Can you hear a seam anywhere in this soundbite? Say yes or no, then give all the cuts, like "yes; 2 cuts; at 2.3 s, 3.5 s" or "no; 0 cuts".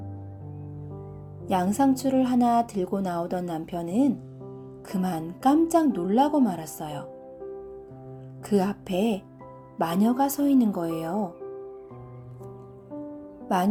no; 0 cuts